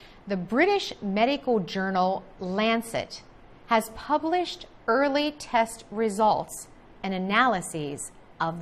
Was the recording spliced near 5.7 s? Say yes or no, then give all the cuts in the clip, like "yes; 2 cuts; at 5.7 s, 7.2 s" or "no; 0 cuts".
no; 1 cut; at 7.5 s